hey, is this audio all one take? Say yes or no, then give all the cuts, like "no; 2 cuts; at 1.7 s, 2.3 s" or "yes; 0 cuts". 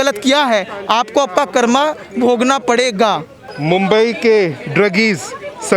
no; 1 cut; at 3.5 s